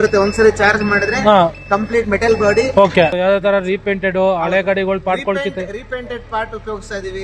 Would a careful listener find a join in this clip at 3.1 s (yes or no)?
yes